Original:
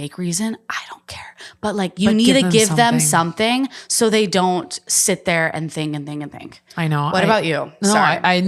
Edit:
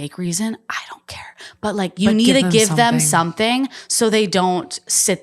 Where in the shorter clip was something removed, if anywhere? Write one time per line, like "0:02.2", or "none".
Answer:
none